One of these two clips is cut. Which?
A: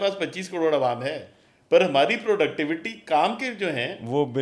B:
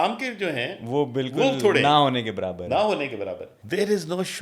B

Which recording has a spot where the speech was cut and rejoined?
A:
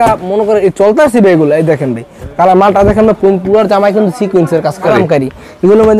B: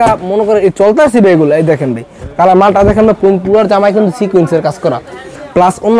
A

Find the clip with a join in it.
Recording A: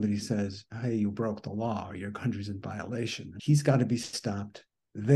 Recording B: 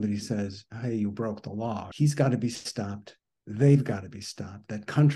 B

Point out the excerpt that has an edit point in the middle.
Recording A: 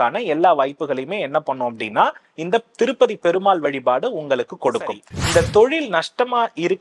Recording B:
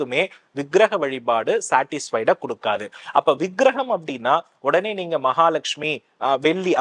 A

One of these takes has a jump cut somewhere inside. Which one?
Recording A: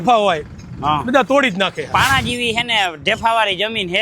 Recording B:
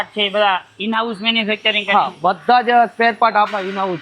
A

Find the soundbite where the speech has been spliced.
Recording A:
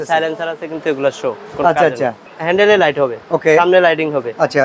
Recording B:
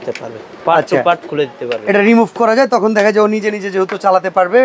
A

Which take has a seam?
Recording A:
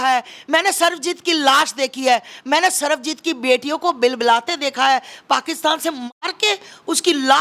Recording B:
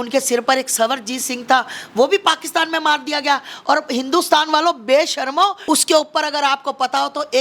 B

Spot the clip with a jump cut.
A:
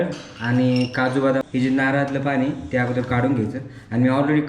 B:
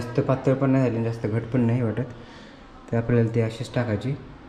A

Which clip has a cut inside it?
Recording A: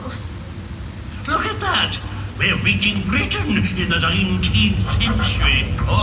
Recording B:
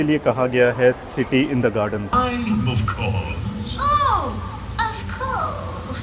B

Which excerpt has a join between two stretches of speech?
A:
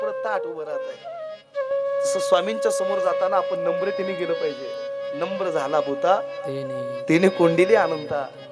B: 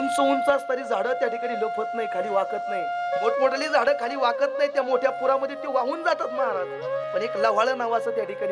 B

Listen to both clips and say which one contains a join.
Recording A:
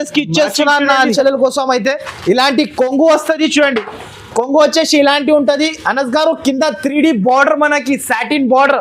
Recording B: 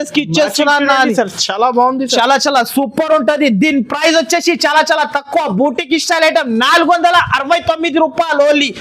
A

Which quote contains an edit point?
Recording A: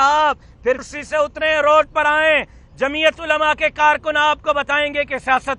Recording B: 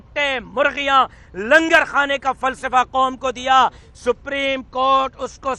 A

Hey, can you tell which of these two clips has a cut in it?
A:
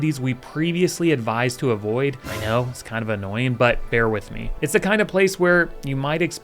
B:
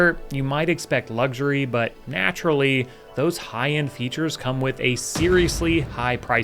A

